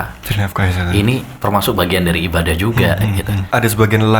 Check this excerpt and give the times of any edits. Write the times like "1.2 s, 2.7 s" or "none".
1.3 s, 3.4 s